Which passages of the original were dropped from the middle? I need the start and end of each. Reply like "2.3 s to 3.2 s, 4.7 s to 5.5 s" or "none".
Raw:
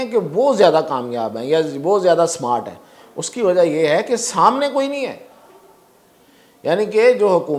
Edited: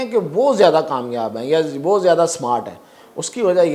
none